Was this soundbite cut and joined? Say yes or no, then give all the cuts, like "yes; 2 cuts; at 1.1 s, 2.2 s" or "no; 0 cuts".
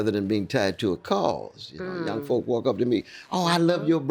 no; 0 cuts